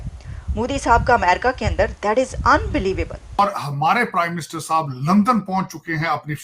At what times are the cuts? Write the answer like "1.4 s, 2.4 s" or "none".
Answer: 3.4 s